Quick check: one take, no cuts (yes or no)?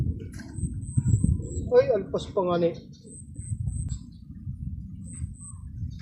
no